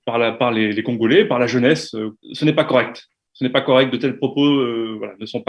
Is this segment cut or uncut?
cut